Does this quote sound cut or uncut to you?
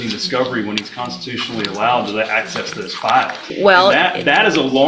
cut